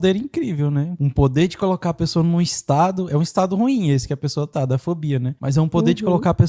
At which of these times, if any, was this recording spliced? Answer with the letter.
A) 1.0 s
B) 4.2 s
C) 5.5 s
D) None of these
A